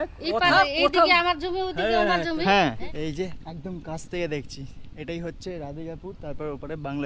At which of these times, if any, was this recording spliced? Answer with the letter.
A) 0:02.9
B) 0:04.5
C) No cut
A